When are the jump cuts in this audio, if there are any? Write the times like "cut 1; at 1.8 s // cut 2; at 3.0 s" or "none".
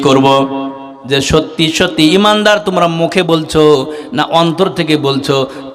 cut 1; at 1.4 s